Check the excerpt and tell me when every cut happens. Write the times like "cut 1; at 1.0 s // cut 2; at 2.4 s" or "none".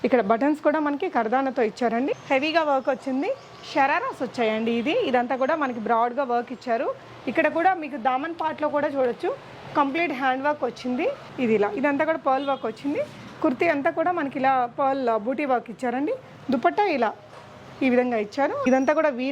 cut 1; at 2.1 s // cut 2; at 11.3 s // cut 3; at 18.6 s